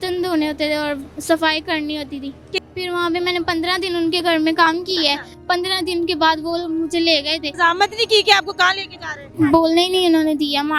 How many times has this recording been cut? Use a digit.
3